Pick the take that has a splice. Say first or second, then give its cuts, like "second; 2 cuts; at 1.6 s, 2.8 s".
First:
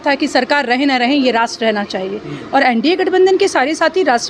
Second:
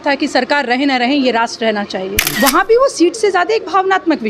second; 1 cut; at 2.2 s